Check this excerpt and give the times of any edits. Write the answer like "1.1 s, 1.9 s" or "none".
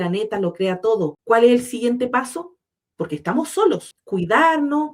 1.2 s, 3.9 s

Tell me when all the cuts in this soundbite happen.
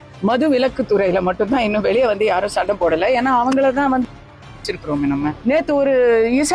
5.4 s

